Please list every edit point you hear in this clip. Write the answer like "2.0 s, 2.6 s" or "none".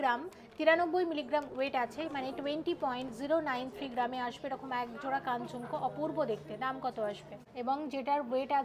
7.4 s

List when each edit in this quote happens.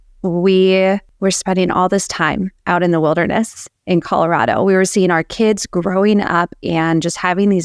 1.1 s

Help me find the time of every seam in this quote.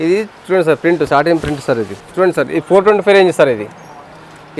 none

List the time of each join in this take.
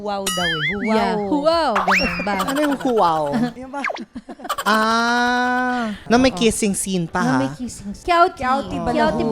3.6 s, 6.0 s, 7.9 s

